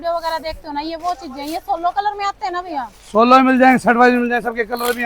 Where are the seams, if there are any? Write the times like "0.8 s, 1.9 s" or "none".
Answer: none